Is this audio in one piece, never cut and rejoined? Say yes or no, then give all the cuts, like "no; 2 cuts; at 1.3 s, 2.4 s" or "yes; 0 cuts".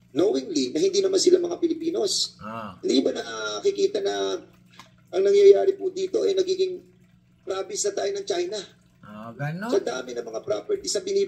no; 1 cut; at 10.1 s